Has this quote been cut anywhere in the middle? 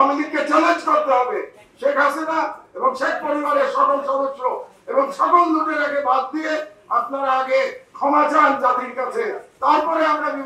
no; 0 cuts

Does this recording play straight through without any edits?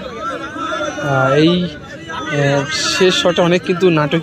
yes; 0 cuts

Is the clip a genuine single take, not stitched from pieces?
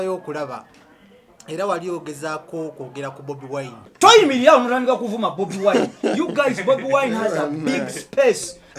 no; 1 cut; at 3.9 s

